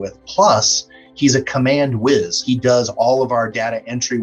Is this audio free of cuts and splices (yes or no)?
no